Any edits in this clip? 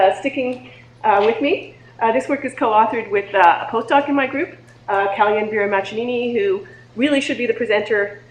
no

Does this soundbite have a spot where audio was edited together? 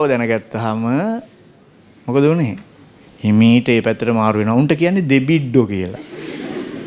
no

